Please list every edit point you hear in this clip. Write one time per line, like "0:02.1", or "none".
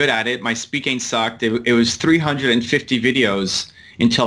none